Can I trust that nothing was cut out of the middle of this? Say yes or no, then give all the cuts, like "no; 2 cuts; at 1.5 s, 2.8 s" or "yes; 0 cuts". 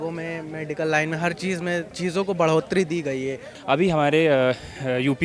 no; 2 cuts; at 1.9 s, 3.5 s